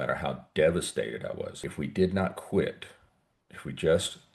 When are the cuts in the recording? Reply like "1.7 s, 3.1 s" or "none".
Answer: 1.5 s

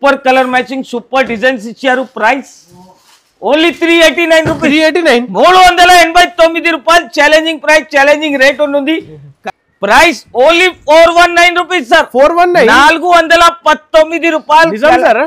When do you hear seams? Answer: 9.3 s

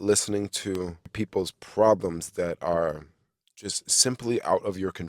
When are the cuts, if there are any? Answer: 1.1 s

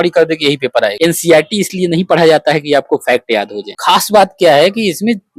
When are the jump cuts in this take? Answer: 0.9 s, 3.7 s

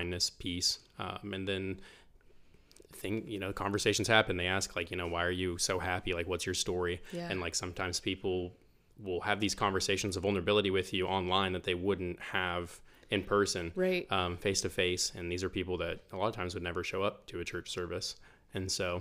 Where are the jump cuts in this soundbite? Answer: none

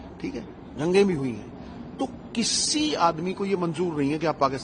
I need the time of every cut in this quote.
none

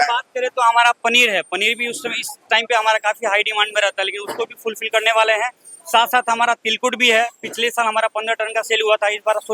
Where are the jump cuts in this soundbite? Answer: none

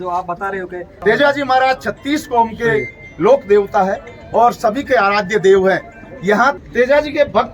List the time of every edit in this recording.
1.0 s, 6.6 s

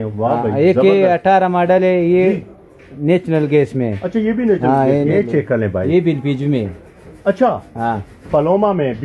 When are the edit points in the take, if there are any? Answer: 5.1 s

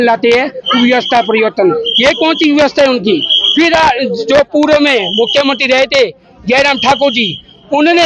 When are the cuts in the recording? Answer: none

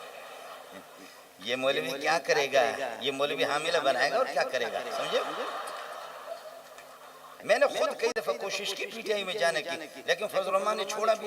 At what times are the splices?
7.3 s

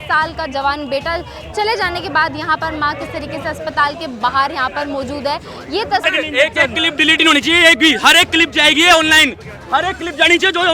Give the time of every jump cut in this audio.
6.0 s

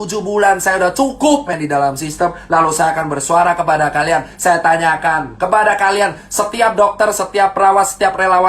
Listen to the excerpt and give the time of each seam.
1.5 s

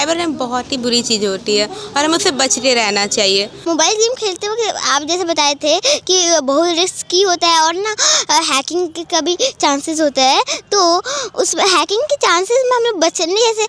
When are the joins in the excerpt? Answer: 3.6 s

